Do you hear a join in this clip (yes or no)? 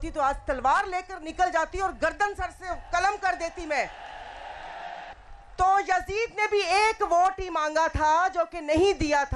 yes